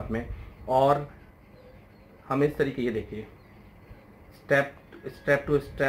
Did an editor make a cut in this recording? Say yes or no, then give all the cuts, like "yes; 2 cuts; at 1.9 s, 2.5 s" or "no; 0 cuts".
no; 0 cuts